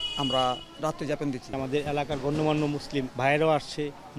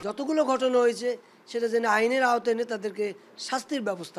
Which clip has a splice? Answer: first; 2 cuts; at 1.5 s, 3.1 s

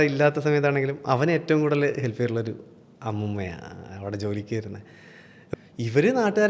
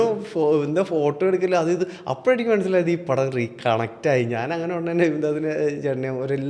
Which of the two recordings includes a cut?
first; 1 cut; at 5.5 s

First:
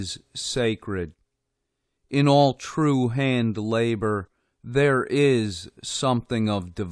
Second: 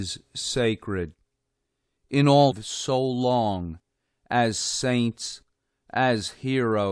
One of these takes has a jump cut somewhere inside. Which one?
first; 1 cut; at 2.6 s

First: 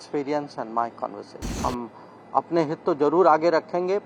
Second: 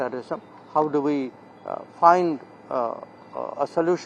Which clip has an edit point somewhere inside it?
first; 1 cut; at 1.5 s

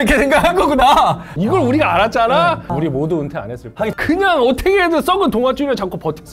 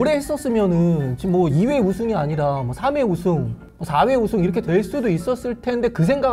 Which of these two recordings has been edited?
first; 3 cuts; at 1.3 s, 2.7 s, 4.0 s

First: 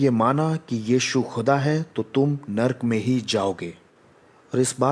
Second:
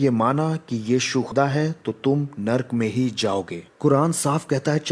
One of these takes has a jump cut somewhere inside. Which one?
second; 2 cuts; at 1.3 s, 3.6 s

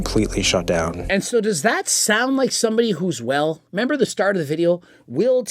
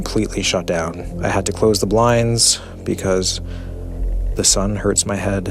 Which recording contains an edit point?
first; 1 cut; at 1.0 s

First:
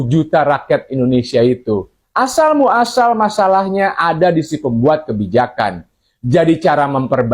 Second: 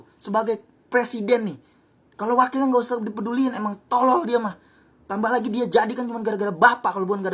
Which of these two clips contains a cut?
first; 1 cut; at 2.0 s

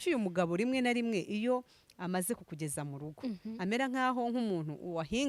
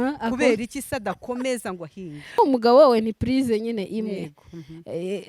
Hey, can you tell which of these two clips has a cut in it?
second; 1 cut; at 2.4 s

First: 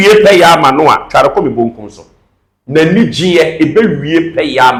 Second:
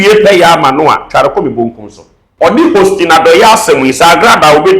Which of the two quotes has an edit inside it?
second; 1 cut; at 2.6 s

